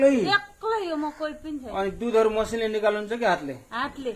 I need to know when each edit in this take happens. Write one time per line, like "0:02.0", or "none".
none